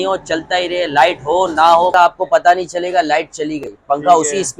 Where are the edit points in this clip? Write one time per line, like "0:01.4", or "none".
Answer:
0:01.9